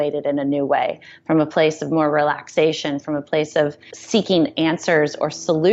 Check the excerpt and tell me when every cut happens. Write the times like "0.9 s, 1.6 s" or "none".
none